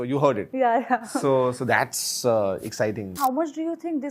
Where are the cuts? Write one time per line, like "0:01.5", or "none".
0:03.1